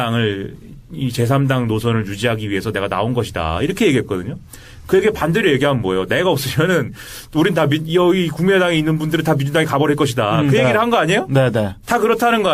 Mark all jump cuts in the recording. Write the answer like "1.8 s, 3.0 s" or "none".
11.4 s